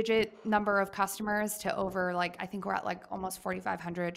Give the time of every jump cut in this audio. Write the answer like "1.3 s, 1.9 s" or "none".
none